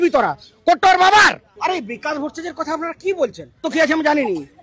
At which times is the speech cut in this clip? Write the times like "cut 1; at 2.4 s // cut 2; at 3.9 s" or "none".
cut 1; at 1.5 s // cut 2; at 3.6 s